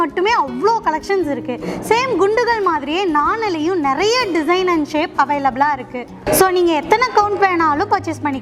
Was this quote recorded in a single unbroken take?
yes; 0 cuts

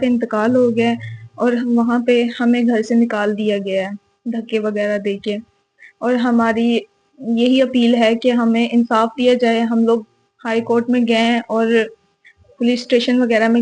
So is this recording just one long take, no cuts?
yes; 0 cuts

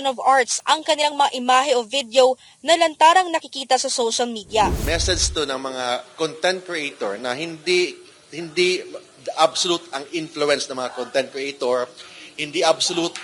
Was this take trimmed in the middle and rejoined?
yes; 1 cut; at 4.8 s

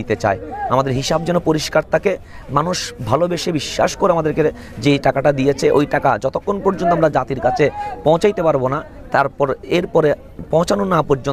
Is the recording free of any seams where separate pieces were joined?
yes; 0 cuts

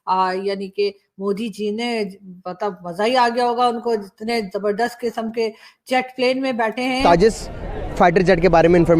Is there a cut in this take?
yes; 1 cut; at 7.0 s

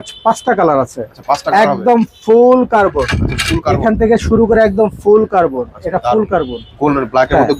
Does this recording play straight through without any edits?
yes; 0 cuts

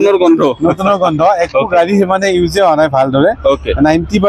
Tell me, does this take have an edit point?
no; 0 cuts

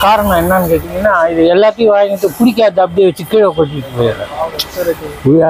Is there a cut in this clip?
no; 0 cuts

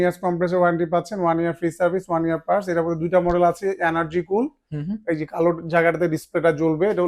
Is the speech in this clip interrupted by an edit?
no; 0 cuts

